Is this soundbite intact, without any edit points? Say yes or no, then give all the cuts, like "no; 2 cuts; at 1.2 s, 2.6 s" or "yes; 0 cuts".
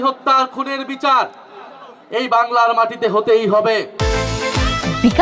yes; 0 cuts